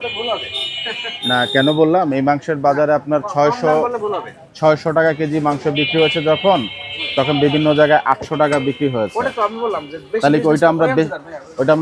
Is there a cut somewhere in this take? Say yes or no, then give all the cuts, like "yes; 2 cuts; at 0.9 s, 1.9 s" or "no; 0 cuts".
no; 0 cuts